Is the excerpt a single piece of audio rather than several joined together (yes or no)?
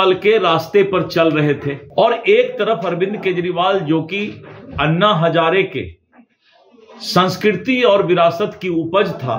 no